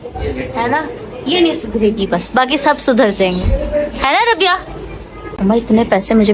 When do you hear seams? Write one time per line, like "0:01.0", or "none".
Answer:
0:05.4